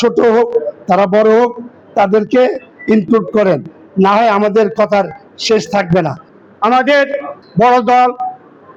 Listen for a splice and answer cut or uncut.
uncut